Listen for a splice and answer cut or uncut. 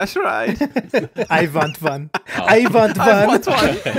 uncut